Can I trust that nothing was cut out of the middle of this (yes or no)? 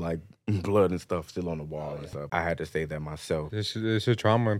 no